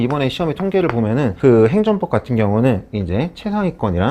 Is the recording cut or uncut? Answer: cut